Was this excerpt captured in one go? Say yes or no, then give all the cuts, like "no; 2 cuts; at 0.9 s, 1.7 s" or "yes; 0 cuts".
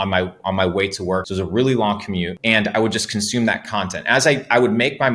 no; 2 cuts; at 1.2 s, 2.3 s